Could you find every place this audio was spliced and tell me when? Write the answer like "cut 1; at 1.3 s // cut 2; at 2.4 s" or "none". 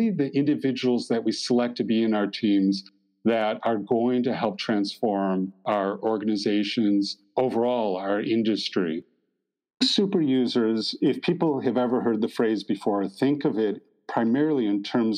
cut 1; at 5.6 s // cut 2; at 7.2 s // cut 3; at 9.3 s